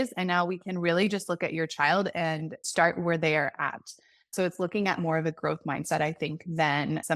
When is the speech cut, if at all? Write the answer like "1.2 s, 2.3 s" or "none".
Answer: 2.6 s